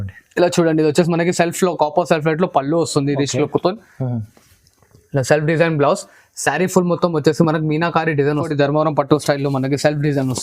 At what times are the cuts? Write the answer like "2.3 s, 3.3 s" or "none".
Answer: 8.5 s